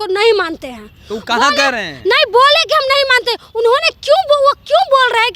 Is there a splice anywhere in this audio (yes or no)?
no